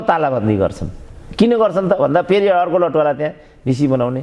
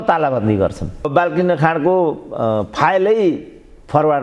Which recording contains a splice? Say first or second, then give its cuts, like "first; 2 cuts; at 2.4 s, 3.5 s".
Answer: second; 1 cut; at 1.1 s